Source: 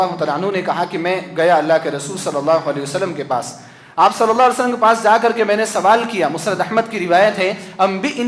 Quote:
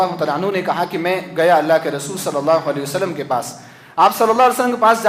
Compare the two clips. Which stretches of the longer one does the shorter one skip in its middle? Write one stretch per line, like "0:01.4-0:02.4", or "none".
none